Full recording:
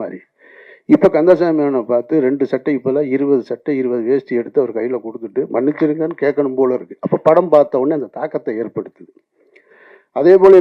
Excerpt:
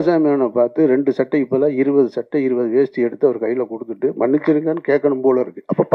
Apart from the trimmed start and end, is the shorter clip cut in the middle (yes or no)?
no